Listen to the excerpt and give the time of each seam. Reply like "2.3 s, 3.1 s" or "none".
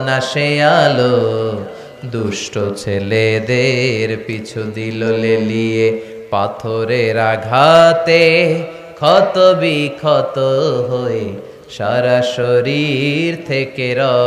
none